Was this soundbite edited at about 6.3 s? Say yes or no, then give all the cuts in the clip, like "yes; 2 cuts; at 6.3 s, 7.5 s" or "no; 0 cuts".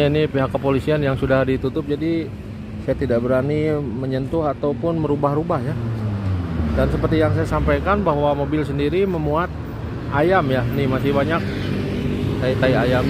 no; 0 cuts